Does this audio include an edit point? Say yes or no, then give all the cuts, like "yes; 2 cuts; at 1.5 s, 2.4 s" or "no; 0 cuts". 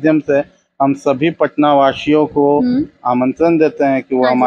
no; 0 cuts